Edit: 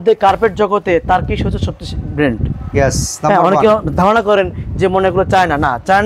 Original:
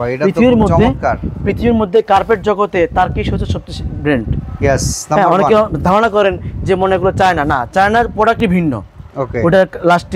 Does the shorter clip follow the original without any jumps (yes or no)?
yes